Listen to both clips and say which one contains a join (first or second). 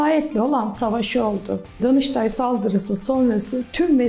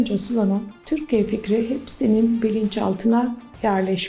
first